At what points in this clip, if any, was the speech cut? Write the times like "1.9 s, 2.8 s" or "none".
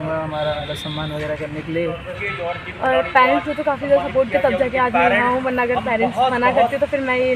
2.2 s